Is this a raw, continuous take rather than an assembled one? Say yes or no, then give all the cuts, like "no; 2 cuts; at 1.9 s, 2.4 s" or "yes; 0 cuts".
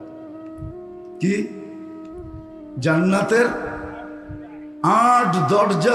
yes; 0 cuts